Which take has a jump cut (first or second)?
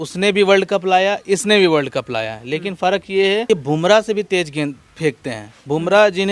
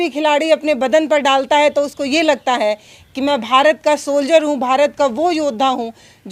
first